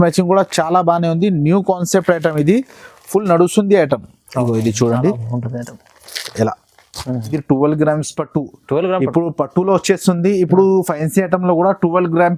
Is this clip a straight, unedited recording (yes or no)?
no